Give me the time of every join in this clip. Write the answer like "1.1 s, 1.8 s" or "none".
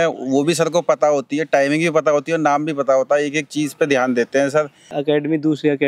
5.0 s